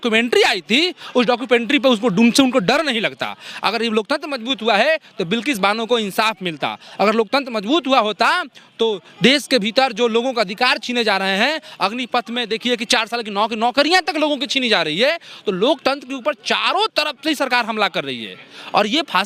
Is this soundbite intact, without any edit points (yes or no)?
yes